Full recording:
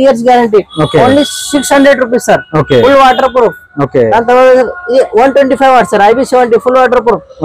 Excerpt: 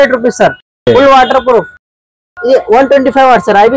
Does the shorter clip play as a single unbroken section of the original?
no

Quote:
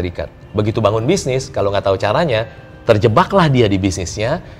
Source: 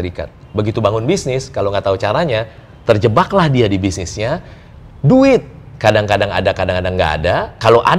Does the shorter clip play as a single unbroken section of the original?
yes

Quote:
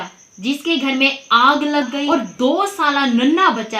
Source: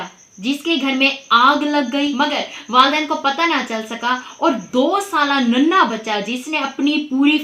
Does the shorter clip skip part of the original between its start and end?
yes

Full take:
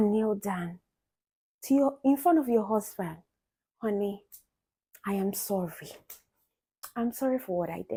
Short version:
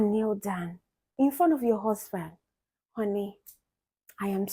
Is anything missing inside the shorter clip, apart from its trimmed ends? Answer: yes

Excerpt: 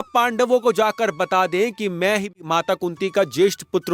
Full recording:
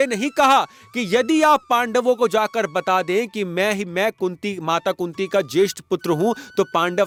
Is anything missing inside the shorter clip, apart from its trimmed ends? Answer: yes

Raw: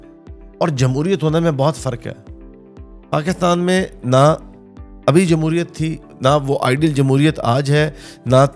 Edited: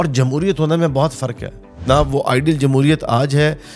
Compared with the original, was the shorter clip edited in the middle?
yes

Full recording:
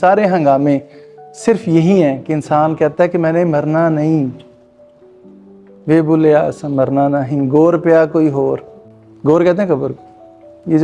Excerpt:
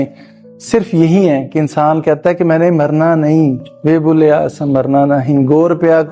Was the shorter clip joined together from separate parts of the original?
yes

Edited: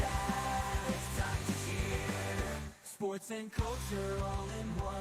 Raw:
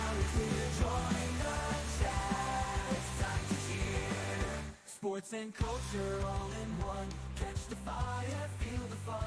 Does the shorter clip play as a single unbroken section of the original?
yes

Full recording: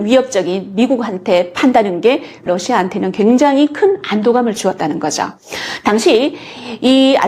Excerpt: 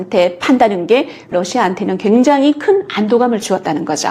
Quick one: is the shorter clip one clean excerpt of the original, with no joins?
yes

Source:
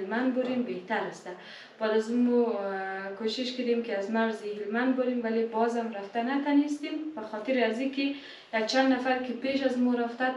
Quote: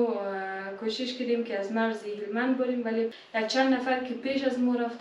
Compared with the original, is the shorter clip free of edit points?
no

